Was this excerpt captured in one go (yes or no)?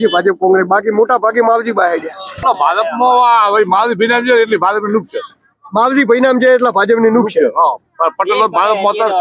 no